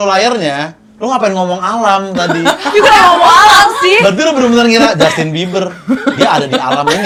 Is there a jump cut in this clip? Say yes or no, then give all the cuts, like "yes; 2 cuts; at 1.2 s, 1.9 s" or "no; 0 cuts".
no; 0 cuts